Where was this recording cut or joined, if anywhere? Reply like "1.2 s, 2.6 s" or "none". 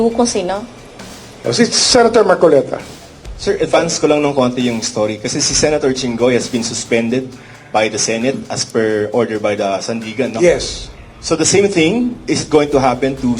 2.8 s

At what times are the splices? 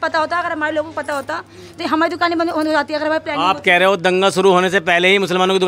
none

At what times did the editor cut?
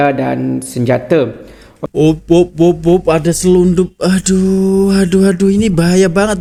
none

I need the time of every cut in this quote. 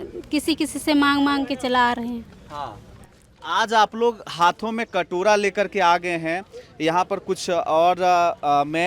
none

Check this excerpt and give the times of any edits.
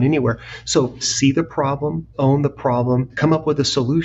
1.1 s, 2.1 s, 3.1 s

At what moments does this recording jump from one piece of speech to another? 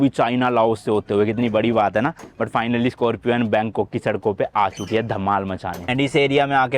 5.8 s

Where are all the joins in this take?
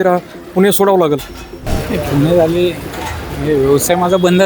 1.4 s

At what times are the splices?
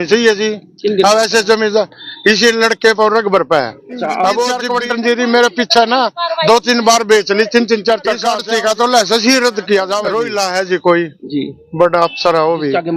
4.7 s, 8.3 s, 10.1 s

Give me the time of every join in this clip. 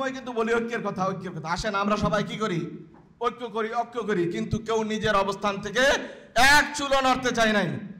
none

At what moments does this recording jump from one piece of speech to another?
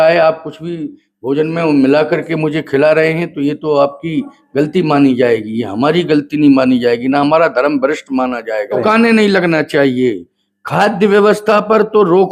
8.8 s

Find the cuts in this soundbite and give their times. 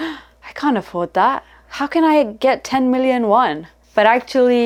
none

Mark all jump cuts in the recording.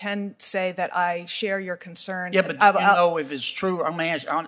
none

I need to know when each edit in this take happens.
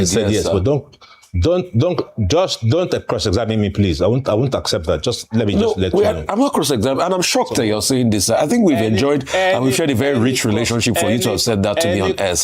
none

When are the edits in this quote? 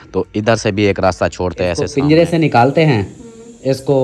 1.9 s

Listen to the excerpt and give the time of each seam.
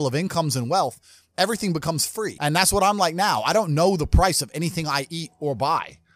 2.4 s

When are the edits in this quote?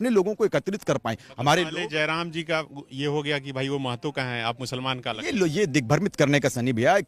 none

